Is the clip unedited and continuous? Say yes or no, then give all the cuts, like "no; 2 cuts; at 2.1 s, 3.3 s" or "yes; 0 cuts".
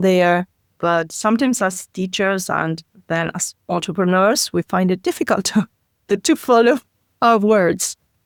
yes; 0 cuts